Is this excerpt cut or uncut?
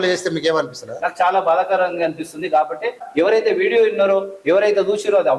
cut